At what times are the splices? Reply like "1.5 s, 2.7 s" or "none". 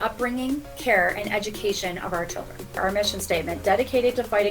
2.8 s